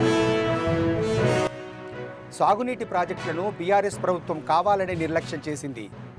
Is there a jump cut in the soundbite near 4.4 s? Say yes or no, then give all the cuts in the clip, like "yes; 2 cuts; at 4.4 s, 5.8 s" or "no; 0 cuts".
no; 1 cut; at 1.7 s